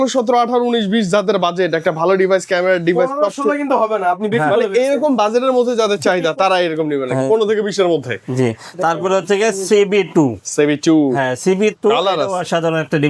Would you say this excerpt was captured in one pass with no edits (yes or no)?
yes